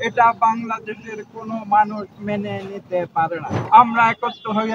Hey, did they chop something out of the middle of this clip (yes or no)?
yes